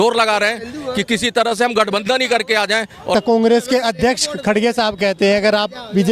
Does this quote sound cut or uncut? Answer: cut